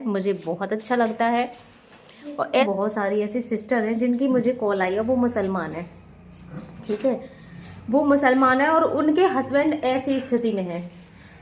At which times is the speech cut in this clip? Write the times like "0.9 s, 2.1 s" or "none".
2.6 s